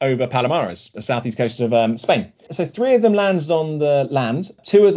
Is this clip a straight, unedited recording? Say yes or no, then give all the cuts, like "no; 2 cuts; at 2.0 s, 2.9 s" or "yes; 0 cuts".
yes; 0 cuts